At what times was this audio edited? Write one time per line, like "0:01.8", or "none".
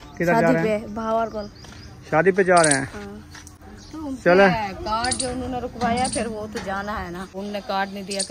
0:07.3